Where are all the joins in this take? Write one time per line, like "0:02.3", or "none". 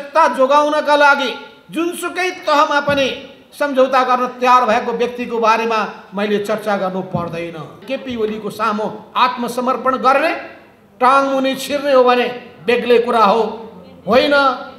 0:07.8